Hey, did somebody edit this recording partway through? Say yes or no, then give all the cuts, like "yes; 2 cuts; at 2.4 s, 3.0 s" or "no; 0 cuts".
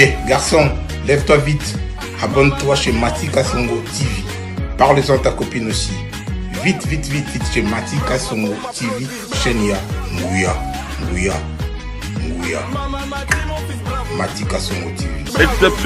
no; 0 cuts